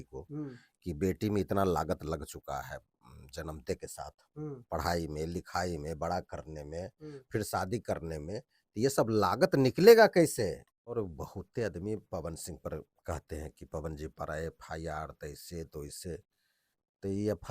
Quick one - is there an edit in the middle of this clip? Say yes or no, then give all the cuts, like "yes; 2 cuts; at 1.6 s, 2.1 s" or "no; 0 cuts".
yes; 1 cut; at 10.9 s